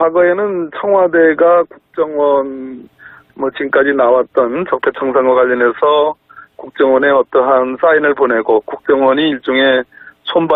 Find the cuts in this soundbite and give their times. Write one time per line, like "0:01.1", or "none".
0:05.7